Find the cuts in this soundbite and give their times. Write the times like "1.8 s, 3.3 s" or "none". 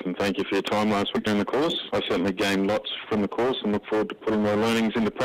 1.8 s, 3.0 s